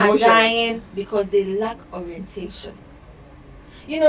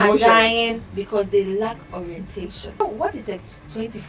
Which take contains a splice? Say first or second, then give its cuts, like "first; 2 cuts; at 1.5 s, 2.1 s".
second; 1 cut; at 2.8 s